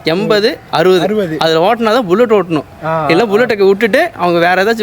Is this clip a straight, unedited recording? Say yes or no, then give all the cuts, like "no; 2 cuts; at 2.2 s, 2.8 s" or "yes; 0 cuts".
yes; 0 cuts